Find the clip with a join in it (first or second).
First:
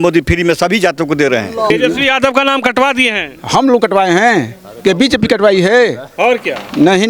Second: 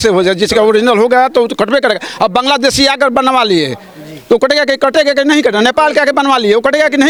first